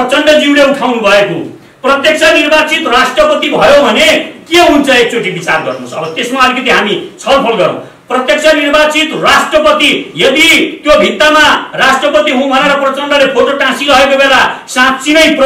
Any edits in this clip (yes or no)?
no